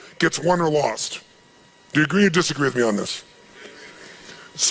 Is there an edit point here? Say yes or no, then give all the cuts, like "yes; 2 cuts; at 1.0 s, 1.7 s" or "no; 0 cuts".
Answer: no; 0 cuts